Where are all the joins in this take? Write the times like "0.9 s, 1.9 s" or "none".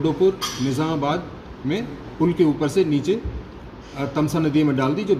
none